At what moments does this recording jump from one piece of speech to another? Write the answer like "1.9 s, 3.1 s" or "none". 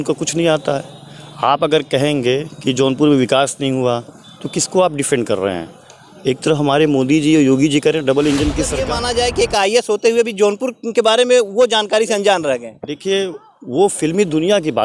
8.9 s